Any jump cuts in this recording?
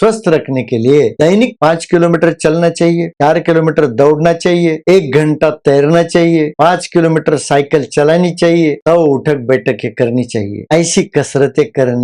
yes; 2 cuts; at 1.5 s, 8.8 s

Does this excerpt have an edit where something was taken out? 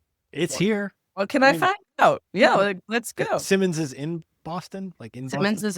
no; 0 cuts

